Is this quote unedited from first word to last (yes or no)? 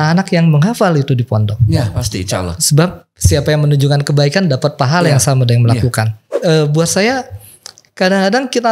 no